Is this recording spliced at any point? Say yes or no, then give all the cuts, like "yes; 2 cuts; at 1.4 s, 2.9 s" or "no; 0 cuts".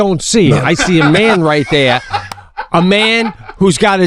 no; 0 cuts